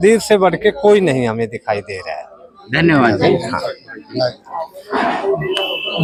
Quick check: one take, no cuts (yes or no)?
yes